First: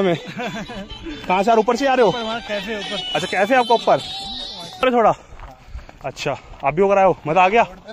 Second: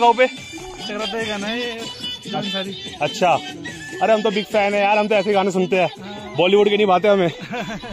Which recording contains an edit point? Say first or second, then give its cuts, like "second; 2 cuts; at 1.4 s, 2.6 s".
first; 1 cut; at 4.6 s